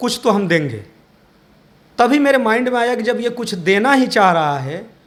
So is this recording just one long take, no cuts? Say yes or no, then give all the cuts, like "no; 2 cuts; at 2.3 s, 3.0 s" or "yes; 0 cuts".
yes; 0 cuts